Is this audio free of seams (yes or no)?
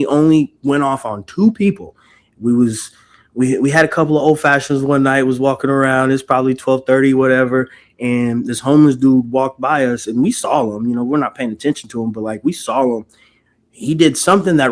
yes